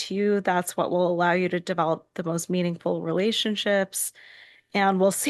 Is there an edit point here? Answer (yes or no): no